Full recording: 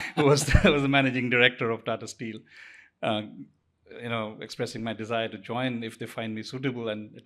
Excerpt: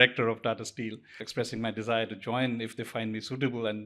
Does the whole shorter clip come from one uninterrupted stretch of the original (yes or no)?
no